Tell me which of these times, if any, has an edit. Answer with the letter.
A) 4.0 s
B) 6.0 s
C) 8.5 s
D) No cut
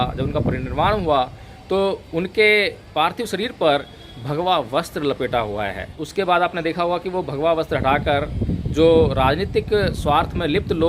B